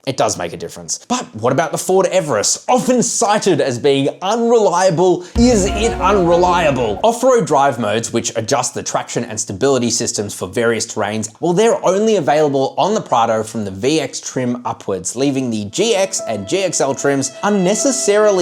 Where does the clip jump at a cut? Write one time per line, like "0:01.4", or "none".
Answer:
0:00.9
0:06.9
0:11.3